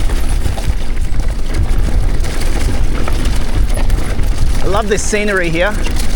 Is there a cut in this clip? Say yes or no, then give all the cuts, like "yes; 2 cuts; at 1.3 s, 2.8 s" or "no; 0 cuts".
no; 0 cuts